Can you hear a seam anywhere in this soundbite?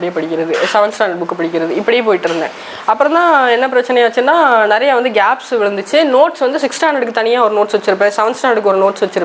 no; 0 cuts

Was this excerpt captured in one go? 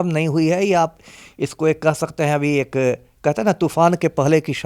yes; 0 cuts

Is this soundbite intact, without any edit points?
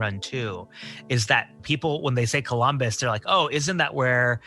no; 1 cut; at 1.6 s

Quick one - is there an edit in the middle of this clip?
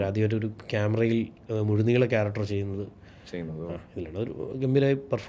no; 0 cuts

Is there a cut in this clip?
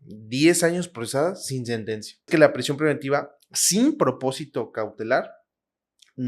yes; 1 cut; at 2.3 s

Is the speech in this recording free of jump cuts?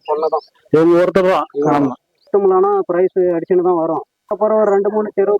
no; 2 cuts; at 2.2 s, 4.2 s

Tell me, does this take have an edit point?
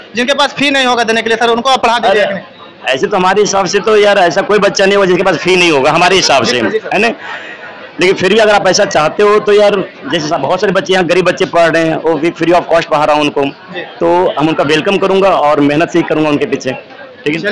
no; 0 cuts

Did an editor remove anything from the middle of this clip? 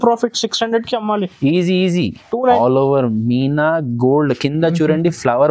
yes; 1 cut; at 2.3 s

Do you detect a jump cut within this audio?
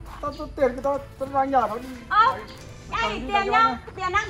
no; 0 cuts

